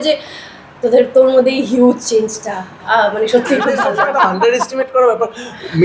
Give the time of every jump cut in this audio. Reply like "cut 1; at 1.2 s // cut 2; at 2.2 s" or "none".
cut 1; at 3.8 s